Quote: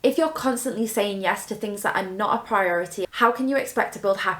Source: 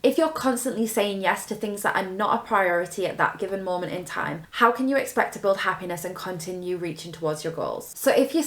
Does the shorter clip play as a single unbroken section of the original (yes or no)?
no